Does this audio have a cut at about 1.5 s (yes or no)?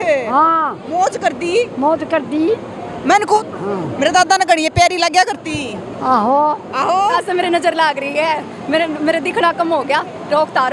no